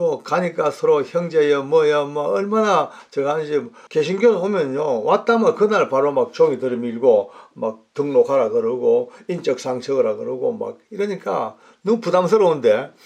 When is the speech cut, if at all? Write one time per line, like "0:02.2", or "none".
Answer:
0:03.8